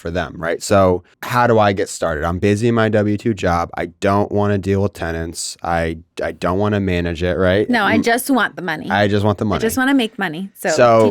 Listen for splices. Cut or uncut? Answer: cut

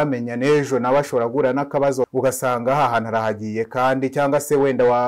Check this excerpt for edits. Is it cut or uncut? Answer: cut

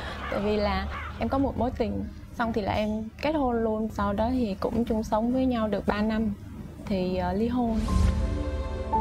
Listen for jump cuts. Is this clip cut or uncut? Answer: cut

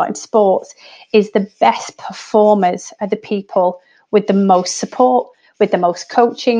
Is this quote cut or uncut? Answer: uncut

